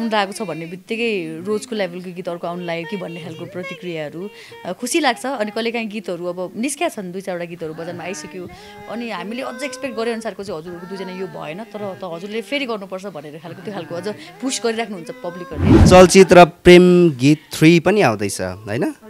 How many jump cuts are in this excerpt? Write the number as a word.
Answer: one